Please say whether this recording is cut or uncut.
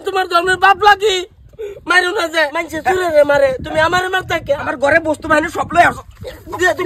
cut